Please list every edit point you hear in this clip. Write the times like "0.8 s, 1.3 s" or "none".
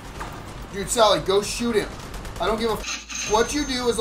none